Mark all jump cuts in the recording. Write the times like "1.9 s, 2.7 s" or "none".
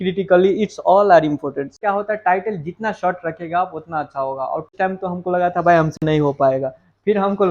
1.8 s, 4.7 s